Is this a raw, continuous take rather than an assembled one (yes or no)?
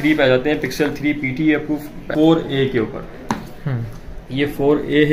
no